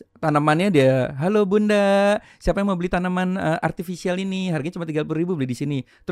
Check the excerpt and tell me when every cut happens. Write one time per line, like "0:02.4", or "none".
none